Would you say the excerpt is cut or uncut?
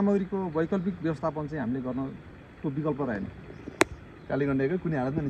uncut